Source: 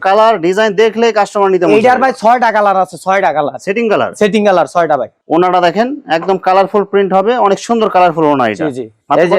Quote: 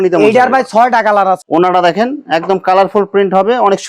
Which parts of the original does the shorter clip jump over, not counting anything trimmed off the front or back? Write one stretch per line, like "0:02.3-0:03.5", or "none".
0:02.9-0:05.2